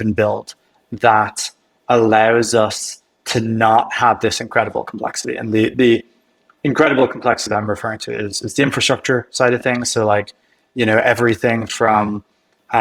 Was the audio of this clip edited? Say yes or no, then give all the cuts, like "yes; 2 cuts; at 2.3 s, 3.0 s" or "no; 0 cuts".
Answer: no; 0 cuts